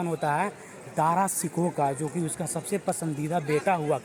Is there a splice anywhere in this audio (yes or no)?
no